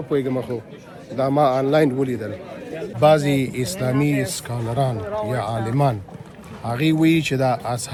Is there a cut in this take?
no; 0 cuts

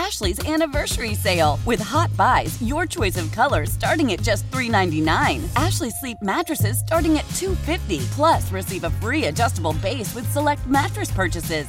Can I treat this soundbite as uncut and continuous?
yes; 0 cuts

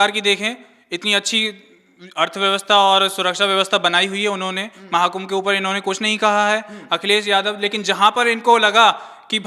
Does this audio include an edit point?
no; 0 cuts

